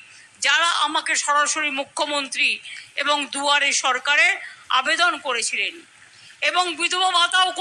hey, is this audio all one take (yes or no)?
yes